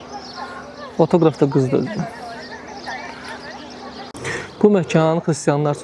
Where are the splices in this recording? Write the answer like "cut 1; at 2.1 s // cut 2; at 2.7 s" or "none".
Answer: cut 1; at 4.1 s